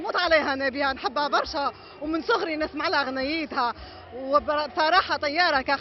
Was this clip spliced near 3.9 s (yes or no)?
no